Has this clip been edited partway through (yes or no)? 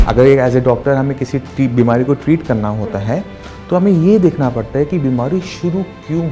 no